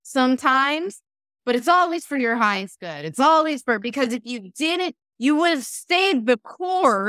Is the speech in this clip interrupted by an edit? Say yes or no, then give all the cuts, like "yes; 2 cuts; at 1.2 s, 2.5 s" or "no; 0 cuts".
no; 0 cuts